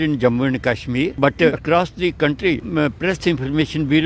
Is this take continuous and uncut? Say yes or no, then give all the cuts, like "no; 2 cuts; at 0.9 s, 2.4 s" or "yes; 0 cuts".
no; 2 cuts; at 1.5 s, 2.6 s